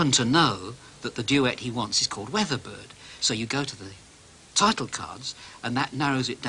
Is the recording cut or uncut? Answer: uncut